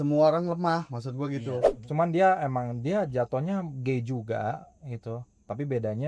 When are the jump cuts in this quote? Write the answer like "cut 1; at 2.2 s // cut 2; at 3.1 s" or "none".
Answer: cut 1; at 1.8 s